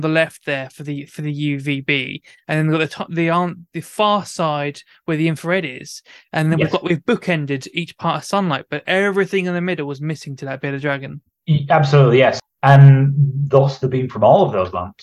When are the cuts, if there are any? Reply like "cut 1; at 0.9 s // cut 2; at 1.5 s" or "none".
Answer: cut 1; at 12.4 s